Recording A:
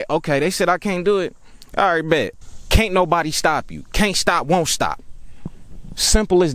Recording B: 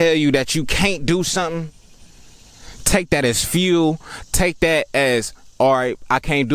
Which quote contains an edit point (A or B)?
A